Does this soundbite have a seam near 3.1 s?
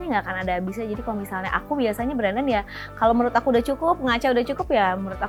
no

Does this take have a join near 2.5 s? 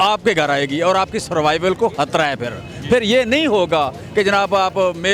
no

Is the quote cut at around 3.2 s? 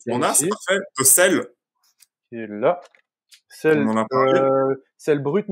no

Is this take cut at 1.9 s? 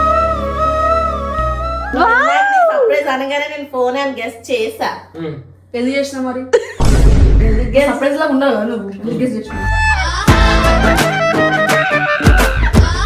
yes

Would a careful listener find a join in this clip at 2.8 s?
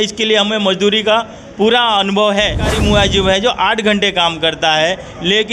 yes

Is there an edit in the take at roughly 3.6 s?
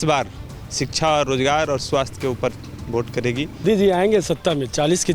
yes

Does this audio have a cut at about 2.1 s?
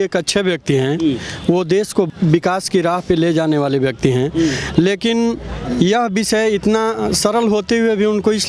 yes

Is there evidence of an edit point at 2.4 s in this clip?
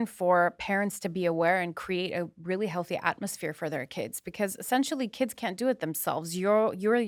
no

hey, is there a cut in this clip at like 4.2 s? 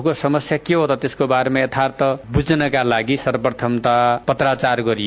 yes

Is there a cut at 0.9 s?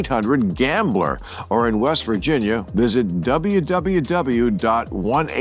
no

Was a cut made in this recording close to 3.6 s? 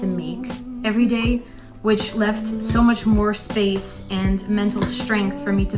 no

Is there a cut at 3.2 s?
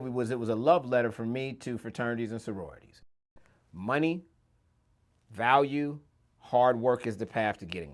yes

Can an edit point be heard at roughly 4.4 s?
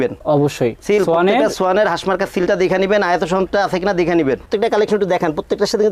yes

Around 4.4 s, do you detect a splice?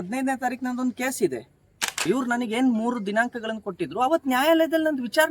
no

